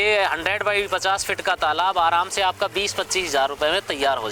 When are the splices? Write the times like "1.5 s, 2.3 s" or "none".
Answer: none